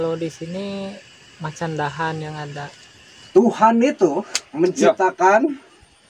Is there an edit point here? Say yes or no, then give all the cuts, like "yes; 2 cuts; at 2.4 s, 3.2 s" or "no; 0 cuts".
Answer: yes; 1 cut; at 3.1 s